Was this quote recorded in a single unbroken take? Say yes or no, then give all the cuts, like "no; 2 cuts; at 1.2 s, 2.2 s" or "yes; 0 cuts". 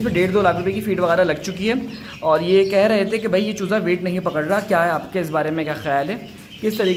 yes; 0 cuts